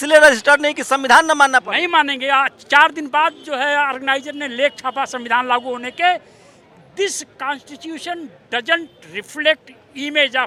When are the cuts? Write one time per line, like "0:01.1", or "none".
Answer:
none